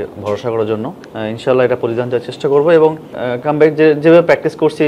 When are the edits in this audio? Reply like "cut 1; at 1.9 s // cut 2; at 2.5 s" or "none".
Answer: cut 1; at 1.0 s // cut 2; at 3.2 s